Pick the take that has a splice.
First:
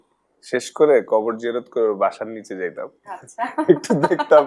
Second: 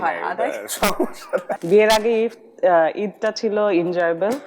second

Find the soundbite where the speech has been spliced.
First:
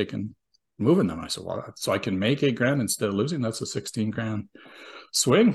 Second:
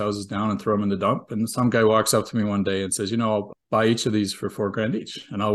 second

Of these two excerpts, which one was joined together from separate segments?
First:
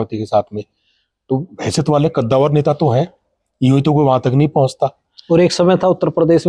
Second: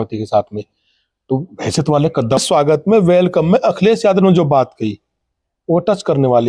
second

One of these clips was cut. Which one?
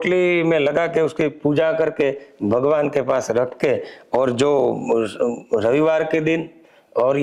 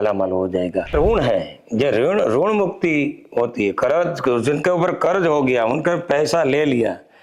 second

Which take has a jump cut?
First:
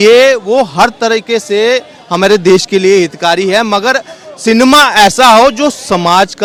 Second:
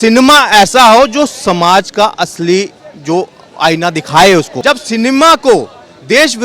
second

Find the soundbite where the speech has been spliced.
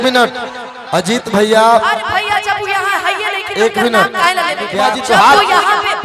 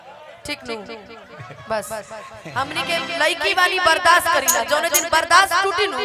first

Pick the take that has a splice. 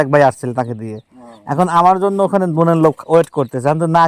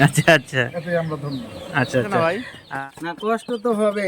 second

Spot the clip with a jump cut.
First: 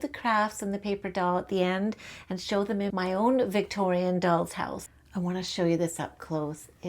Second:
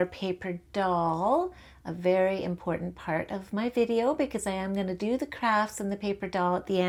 first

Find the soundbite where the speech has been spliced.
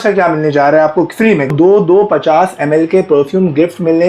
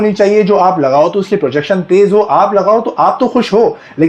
first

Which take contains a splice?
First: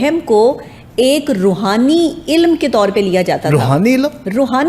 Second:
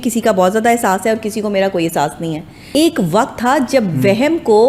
second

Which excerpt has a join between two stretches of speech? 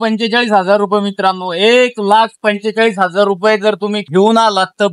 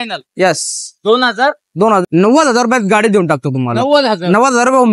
second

